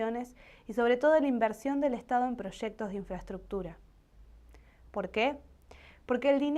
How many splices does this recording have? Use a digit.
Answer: 1